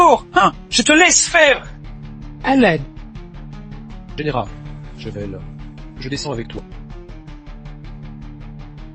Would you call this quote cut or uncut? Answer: cut